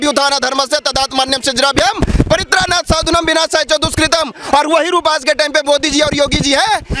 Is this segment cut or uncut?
uncut